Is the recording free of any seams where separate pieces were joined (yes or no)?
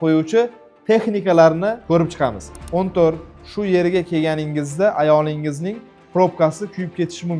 no